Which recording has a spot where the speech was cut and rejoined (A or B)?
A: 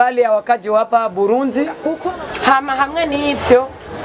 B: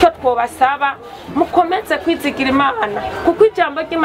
A